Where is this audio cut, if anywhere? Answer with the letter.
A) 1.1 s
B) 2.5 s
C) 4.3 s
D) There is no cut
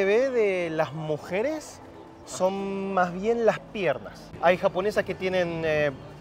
C